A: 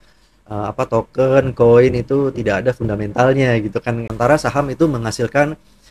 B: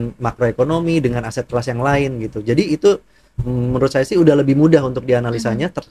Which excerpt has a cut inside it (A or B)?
A